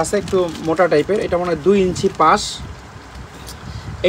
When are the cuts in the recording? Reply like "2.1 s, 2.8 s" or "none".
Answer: none